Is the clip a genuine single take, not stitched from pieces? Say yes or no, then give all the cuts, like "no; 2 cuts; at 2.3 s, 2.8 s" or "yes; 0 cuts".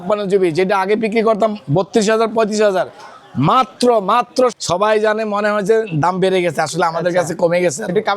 no; 1 cut; at 4.6 s